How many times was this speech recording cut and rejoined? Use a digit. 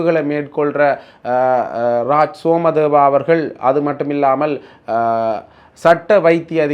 0